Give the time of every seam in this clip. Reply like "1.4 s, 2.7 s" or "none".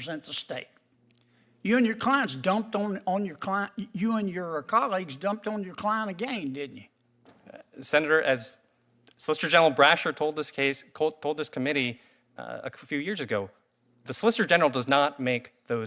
none